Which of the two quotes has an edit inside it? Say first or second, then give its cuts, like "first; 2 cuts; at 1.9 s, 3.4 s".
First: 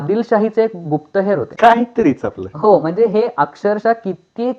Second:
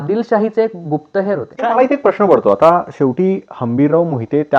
second; 1 cut; at 1.5 s